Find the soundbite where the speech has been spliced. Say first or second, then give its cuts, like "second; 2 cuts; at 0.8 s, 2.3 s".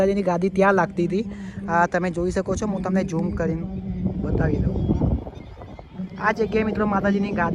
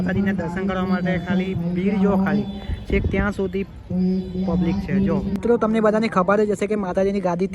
second; 1 cut; at 5.6 s